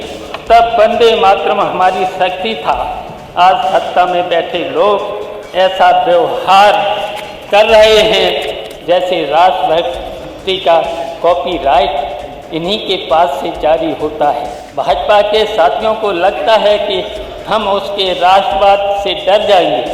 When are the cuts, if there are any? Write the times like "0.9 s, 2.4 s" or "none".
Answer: 8.7 s, 14.6 s